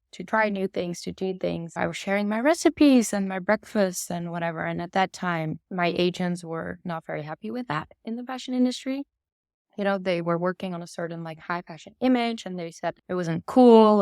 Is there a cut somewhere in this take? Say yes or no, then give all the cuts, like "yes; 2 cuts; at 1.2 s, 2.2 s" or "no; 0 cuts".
yes; 3 cuts; at 1.7 s, 5.6 s, 13.0 s